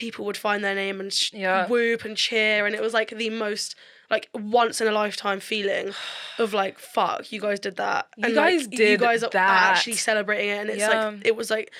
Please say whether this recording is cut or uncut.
uncut